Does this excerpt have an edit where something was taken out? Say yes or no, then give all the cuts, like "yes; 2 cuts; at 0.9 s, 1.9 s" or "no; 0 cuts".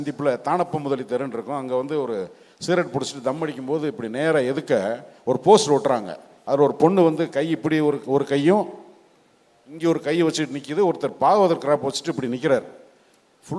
no; 0 cuts